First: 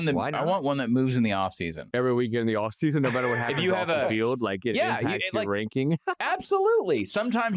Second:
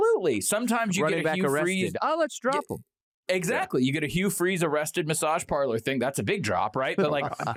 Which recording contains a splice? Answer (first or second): first